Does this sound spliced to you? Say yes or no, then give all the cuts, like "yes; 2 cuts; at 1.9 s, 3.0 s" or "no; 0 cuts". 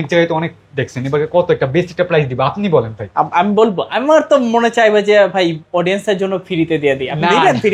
no; 0 cuts